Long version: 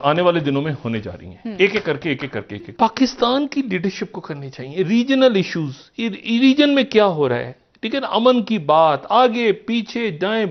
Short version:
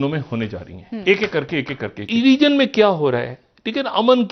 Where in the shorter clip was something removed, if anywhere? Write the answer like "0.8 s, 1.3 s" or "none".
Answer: 2.0 s